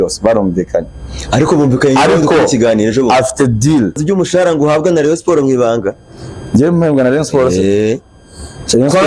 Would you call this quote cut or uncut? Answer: cut